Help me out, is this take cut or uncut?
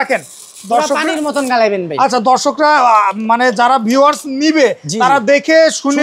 uncut